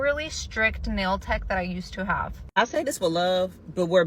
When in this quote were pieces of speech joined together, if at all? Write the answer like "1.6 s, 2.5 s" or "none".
2.4 s